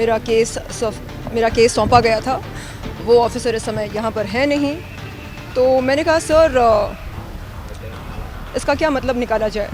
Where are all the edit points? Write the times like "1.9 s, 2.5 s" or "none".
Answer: none